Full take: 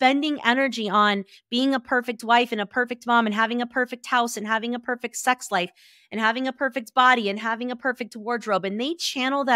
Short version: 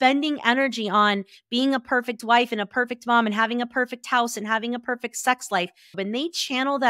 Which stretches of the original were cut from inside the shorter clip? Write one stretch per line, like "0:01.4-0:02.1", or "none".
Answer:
0:06.0-0:08.6